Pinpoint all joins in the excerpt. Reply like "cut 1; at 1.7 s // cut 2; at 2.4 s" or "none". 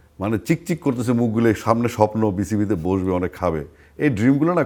none